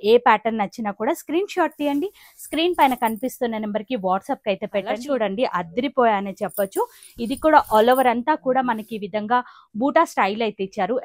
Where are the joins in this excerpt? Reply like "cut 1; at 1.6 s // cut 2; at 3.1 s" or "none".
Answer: cut 1; at 5.0 s